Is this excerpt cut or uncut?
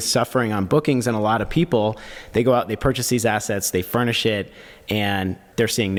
uncut